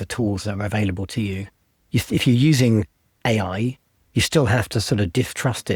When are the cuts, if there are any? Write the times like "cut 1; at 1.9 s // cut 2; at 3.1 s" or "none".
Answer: none